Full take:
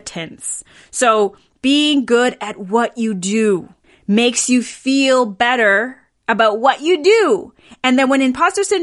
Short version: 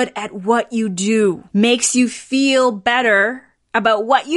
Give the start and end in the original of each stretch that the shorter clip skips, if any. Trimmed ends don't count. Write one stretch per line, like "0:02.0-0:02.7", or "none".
0:03.7-0:04.0